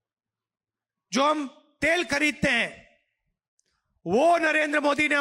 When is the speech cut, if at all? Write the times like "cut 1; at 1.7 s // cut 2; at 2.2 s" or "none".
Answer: none